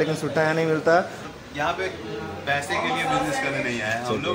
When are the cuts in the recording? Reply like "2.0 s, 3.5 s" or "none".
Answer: 1.3 s